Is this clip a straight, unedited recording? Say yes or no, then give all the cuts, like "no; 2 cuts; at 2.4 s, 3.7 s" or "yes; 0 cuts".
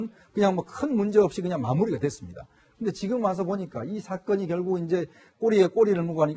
no; 1 cut; at 2.2 s